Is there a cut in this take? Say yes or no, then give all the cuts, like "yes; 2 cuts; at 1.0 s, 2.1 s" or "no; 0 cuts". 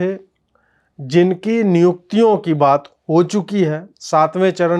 no; 0 cuts